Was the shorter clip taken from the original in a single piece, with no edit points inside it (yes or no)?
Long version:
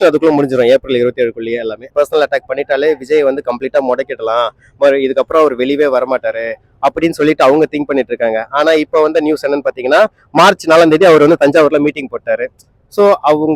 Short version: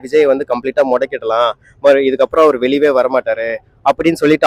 yes